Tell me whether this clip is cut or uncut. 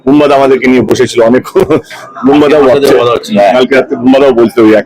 uncut